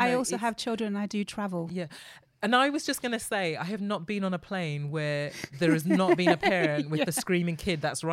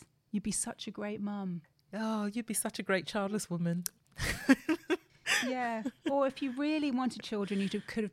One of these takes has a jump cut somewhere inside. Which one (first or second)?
second